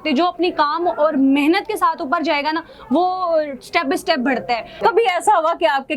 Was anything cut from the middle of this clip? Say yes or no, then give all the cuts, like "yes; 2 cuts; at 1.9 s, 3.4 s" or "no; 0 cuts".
yes; 1 cut; at 4.8 s